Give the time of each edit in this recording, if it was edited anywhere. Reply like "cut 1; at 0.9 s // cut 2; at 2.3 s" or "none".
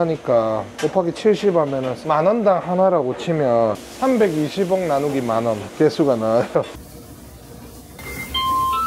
cut 1; at 1.9 s // cut 2; at 3.9 s // cut 3; at 5.7 s // cut 4; at 6.8 s